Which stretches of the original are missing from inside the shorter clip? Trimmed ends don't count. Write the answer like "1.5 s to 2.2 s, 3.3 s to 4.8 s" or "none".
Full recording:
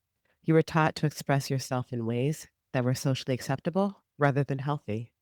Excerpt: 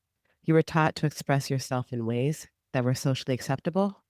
none

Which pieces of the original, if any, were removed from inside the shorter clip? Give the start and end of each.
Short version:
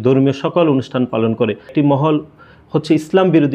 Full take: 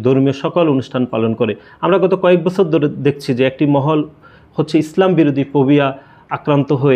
1.7 s to 3.5 s

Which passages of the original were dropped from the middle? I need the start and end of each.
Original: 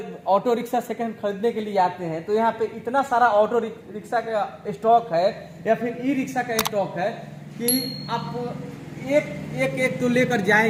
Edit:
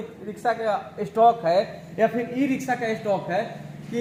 none

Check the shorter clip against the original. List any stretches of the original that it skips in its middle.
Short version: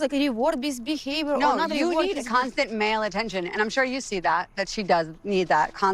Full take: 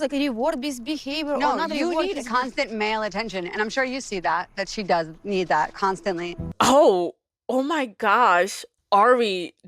none

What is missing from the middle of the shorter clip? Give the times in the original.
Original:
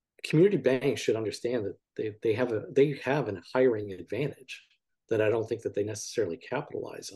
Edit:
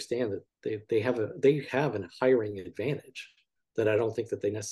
none

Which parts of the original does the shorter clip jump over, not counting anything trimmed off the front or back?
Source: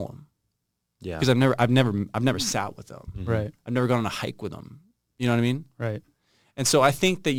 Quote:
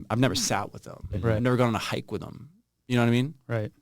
3.4 s to 3.7 s

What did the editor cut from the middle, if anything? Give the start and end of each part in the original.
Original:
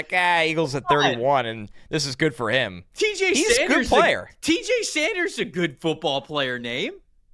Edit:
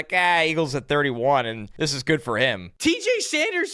1.6 s to 1.8 s, 2.8 s to 4.3 s

